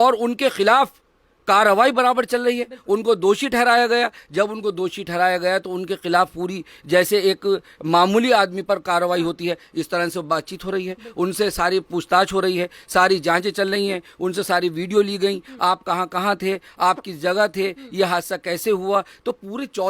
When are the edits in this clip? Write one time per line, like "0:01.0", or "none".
none